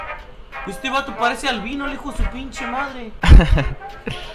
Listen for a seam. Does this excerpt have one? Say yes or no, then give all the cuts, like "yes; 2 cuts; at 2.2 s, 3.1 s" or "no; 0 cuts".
no; 0 cuts